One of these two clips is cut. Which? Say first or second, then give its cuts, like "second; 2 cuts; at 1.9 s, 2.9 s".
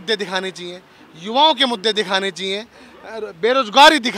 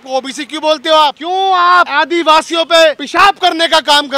second; 3 cuts; at 1.2 s, 1.9 s, 3.0 s